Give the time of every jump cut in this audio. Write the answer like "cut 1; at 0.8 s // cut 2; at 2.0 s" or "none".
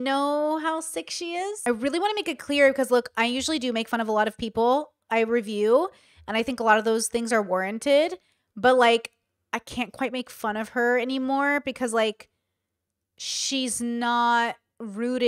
cut 1; at 1.6 s